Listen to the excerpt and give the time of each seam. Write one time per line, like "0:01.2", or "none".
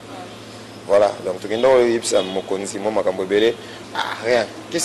0:03.7